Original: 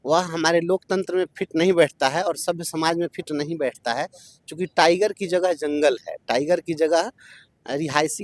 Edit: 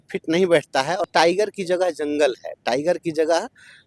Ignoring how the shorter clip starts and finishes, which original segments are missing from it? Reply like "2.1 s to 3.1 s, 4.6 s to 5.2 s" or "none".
2.4 s to 4.7 s